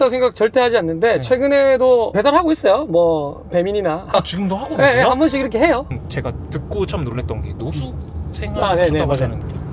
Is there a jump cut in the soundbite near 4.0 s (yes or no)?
no